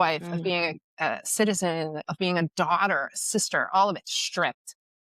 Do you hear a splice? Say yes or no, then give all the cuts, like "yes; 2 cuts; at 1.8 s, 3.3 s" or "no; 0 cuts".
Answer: yes; 1 cut; at 2.0 s